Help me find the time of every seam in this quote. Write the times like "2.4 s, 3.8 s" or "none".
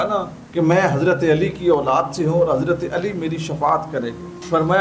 none

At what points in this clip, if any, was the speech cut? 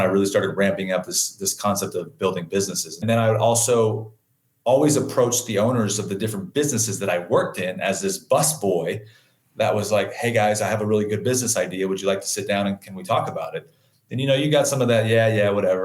3.0 s

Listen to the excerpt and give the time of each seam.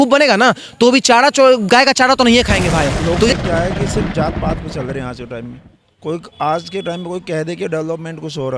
3.3 s

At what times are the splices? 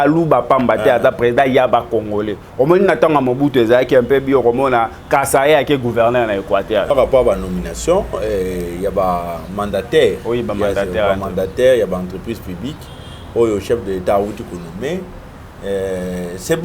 6.9 s

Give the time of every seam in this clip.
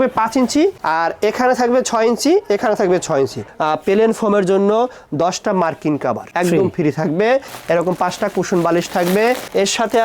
3.5 s, 7.5 s

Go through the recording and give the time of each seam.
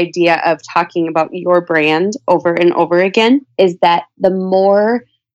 3.5 s

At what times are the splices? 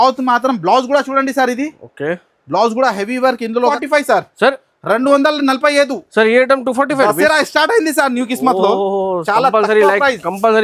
3.7 s

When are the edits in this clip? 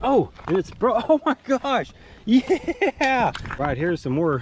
3.5 s

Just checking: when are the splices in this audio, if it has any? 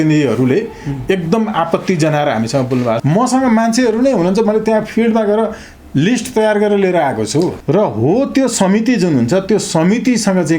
3.0 s, 7.6 s

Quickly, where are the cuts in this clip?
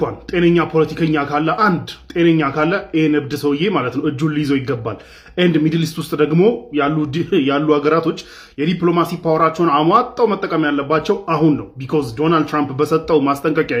none

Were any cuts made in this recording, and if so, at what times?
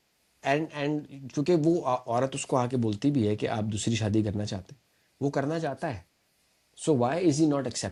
none

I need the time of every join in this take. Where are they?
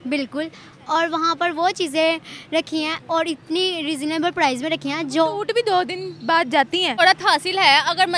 7.0 s

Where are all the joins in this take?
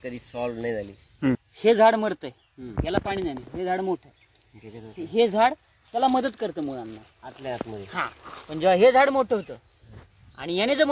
1.5 s

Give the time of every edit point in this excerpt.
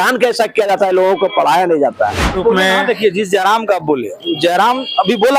2.4 s

